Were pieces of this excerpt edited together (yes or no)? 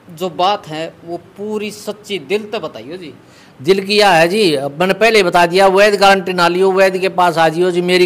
no